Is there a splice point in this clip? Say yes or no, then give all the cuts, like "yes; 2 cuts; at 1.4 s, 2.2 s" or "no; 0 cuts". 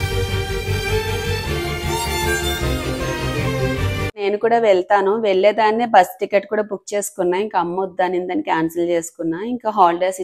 no; 0 cuts